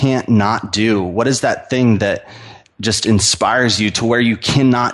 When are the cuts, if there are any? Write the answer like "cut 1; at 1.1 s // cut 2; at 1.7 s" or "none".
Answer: none